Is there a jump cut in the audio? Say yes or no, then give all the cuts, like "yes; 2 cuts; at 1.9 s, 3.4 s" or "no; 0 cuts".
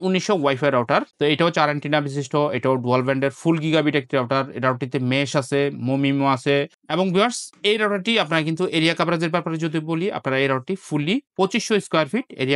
no; 0 cuts